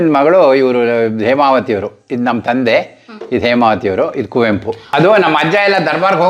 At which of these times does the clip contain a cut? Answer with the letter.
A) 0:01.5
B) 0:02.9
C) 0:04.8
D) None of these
C